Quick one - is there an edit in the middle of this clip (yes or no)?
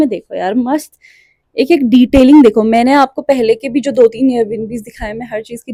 no